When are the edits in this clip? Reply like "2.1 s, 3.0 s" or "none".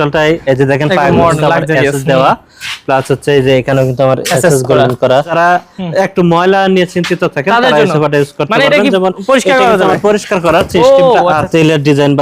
5.3 s, 11.3 s